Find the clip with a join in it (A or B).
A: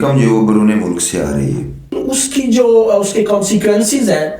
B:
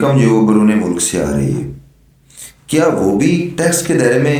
A